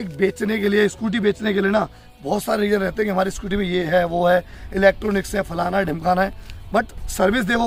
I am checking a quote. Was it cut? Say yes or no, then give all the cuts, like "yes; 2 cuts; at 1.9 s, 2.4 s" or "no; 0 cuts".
no; 0 cuts